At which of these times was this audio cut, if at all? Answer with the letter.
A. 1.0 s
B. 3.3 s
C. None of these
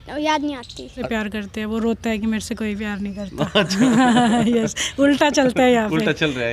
A